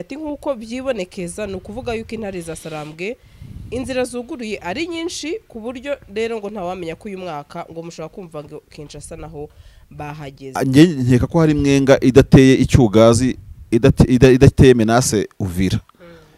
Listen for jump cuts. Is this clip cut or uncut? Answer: cut